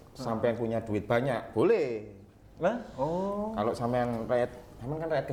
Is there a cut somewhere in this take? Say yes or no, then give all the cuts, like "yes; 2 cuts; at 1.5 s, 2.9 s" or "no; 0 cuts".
no; 0 cuts